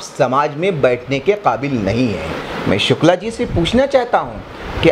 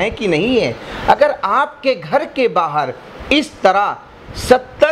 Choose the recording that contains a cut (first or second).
first